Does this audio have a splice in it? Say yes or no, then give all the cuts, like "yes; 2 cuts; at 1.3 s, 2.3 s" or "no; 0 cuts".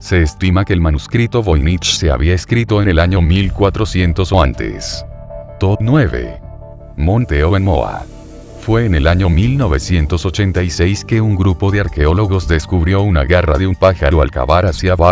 yes; 1 cut; at 12.4 s